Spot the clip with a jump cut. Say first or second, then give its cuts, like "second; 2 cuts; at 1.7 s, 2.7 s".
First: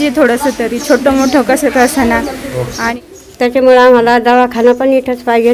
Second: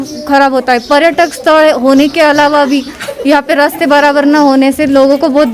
first; 1 cut; at 2.8 s